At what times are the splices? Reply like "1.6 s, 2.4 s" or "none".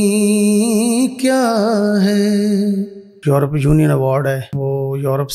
3.2 s, 4.5 s